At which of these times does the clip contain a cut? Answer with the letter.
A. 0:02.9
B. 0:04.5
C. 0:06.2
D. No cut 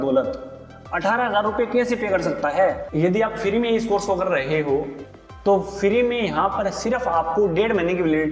A